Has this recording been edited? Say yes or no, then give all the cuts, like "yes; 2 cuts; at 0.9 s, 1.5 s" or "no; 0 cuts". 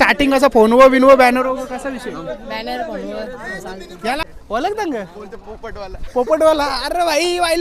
yes; 1 cut; at 4.2 s